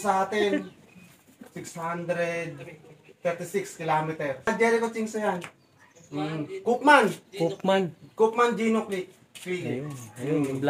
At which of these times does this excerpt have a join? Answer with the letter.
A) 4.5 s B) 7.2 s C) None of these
A